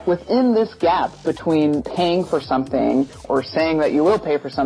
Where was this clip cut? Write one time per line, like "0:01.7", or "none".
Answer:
0:01.8
0:03.2